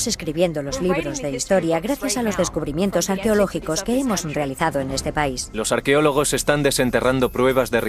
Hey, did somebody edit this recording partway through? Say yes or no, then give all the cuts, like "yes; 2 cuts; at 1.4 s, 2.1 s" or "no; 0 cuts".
yes; 1 cut; at 5.7 s